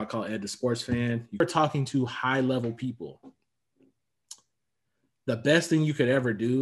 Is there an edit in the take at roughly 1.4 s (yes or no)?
yes